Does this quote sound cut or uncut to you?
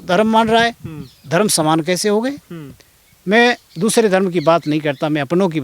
uncut